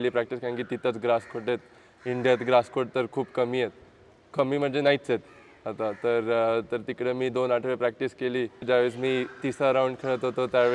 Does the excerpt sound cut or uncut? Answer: uncut